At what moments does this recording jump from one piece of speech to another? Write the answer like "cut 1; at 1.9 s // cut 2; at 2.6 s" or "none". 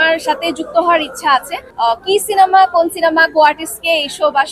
cut 1; at 1.6 s